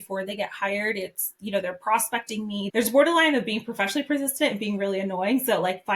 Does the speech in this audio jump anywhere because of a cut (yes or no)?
yes